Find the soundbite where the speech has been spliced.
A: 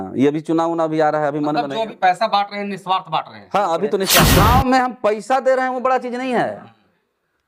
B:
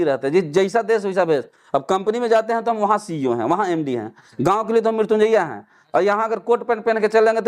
A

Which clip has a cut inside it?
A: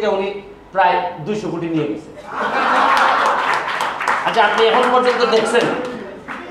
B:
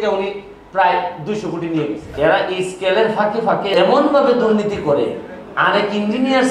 B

